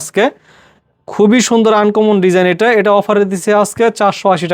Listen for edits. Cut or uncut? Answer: uncut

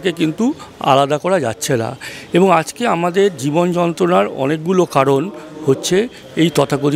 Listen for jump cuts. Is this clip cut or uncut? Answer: uncut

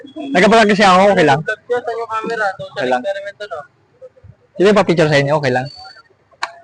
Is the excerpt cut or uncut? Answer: uncut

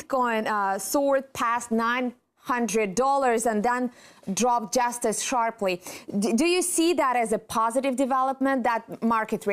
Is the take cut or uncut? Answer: cut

